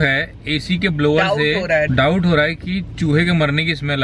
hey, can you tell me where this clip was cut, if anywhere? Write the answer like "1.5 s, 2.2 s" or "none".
1.9 s